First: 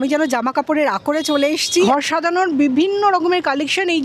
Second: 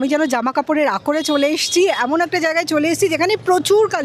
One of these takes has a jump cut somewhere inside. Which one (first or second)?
first